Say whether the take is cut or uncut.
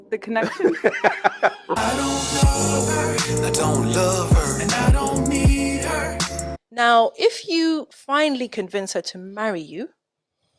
cut